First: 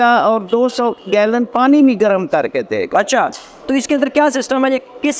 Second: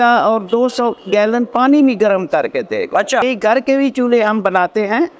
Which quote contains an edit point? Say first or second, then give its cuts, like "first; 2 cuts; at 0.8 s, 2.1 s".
second; 1 cut; at 3.2 s